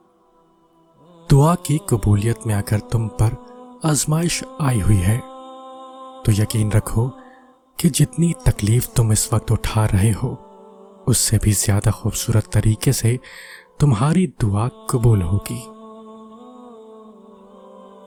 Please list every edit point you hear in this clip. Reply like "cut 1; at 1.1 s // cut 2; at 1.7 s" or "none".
none